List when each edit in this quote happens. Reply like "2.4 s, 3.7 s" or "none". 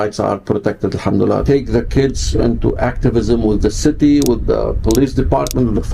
1.4 s

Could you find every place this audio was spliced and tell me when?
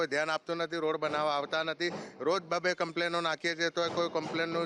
none

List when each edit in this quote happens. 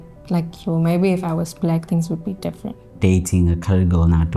3.0 s

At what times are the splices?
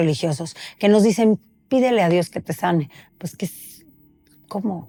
none

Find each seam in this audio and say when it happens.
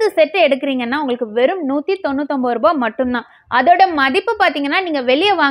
none

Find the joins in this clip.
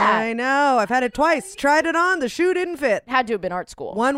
1.6 s, 3.1 s

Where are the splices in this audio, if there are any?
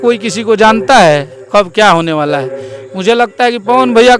none

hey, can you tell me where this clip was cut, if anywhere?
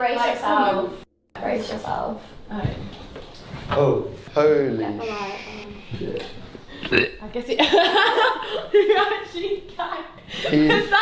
none

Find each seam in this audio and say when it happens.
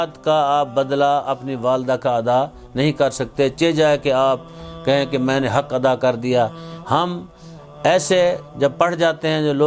none

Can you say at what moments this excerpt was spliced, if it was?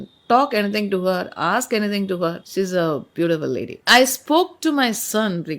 2.4 s, 3.9 s

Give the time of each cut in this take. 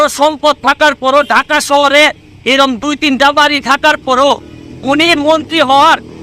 none

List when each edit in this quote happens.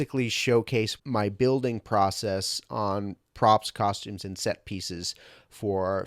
0.9 s

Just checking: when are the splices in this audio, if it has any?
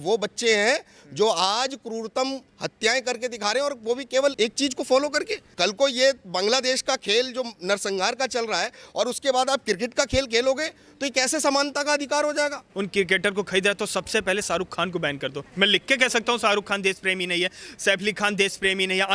4.3 s, 5.4 s, 12.6 s, 15.4 s

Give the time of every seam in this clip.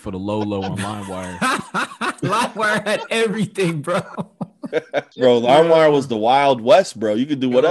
5.1 s

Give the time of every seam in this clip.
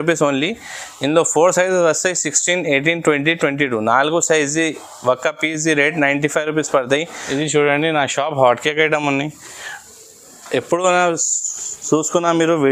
7.2 s

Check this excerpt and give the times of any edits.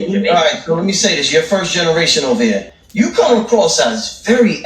2.8 s

